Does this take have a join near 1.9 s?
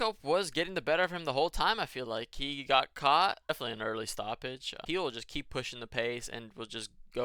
no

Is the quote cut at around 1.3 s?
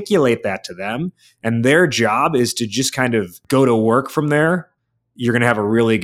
no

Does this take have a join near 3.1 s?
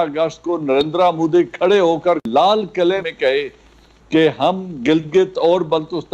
yes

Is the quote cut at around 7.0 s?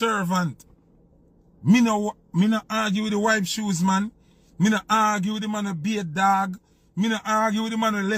no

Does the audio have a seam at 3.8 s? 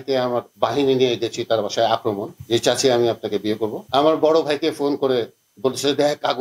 yes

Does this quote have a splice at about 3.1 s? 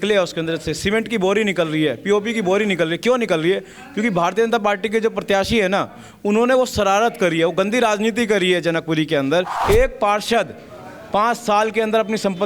no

